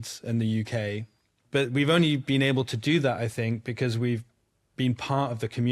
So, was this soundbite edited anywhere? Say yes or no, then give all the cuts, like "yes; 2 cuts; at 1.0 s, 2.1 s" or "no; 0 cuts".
yes; 1 cut; at 1.4 s